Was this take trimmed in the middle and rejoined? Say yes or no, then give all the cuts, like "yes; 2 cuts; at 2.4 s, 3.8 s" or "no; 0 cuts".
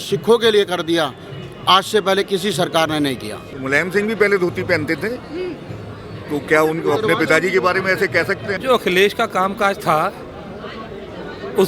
yes; 2 cuts; at 3.5 s, 8.5 s